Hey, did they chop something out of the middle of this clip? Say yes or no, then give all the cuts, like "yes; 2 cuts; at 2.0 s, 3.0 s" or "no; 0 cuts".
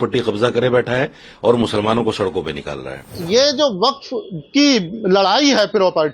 yes; 1 cut; at 3.2 s